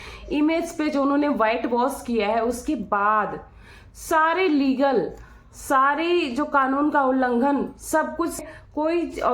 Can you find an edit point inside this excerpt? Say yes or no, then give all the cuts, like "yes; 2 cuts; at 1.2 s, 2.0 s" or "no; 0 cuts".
yes; 1 cut; at 8.4 s